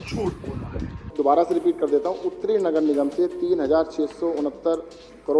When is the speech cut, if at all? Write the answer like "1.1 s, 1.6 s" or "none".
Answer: 1.0 s